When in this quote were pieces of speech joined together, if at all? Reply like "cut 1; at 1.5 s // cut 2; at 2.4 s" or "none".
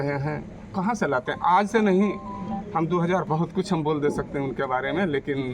cut 1; at 3.2 s